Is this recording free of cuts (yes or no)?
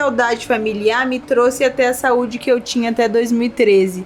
yes